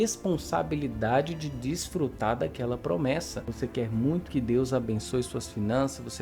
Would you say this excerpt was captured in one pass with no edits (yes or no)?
no